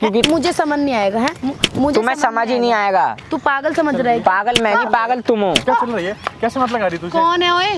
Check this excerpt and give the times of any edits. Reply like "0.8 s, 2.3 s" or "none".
none

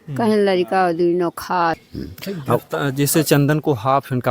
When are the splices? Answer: 1.9 s

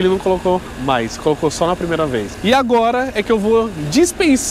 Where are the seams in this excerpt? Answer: 2.3 s

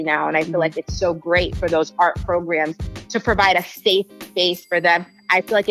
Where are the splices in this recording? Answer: none

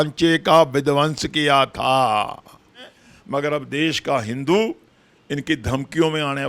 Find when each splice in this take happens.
3.0 s

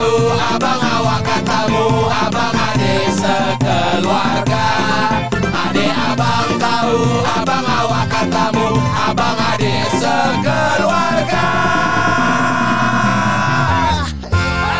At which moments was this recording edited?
none

